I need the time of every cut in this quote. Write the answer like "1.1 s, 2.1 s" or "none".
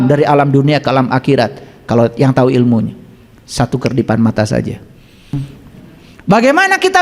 5.3 s